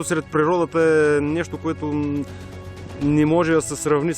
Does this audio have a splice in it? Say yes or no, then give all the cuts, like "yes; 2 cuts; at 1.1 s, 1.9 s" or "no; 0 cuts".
no; 0 cuts